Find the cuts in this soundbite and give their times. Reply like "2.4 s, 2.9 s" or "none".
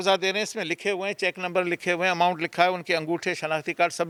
none